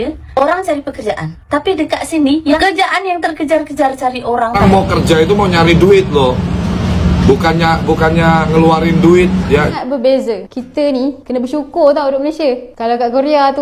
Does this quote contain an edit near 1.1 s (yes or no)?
no